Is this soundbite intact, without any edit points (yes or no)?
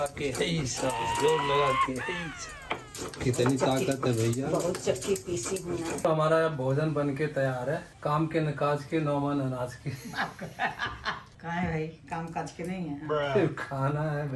no